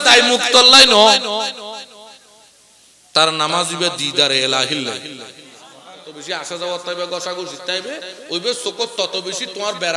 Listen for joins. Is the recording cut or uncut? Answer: cut